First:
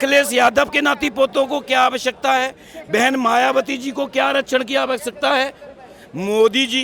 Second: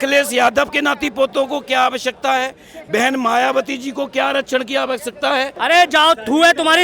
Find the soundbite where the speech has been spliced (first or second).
second